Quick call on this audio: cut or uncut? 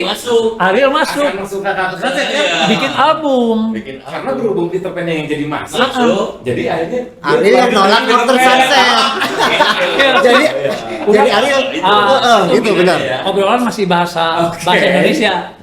uncut